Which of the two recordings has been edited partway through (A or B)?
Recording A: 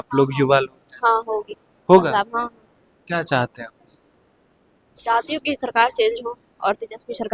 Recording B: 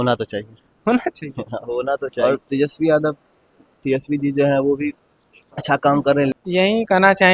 B